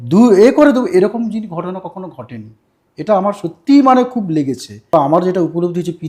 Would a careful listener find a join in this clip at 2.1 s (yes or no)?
no